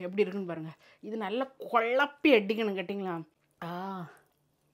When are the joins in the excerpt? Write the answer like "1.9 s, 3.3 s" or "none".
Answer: 3.4 s